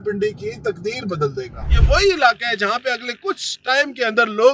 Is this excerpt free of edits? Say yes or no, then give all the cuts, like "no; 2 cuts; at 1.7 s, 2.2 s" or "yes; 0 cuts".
no; 1 cut; at 1.7 s